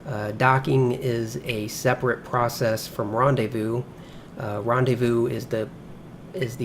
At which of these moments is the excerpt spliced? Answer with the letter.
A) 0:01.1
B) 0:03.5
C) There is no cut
B